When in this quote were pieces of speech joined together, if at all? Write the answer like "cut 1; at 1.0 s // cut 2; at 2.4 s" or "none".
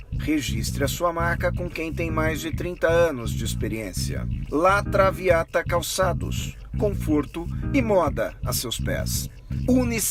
none